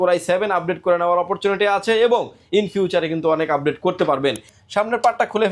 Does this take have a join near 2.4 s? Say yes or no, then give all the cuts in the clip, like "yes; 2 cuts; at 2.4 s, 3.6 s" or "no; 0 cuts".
no; 1 cut; at 4.5 s